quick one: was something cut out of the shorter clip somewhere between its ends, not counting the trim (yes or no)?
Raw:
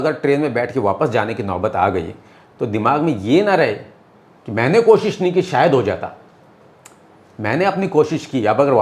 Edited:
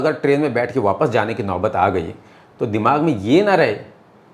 no